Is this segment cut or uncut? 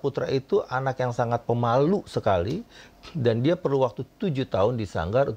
uncut